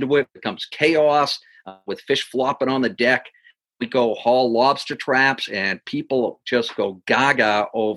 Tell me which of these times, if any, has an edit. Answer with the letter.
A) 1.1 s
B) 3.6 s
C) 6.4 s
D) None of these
D